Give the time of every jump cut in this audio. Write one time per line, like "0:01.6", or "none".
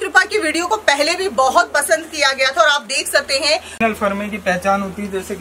0:03.7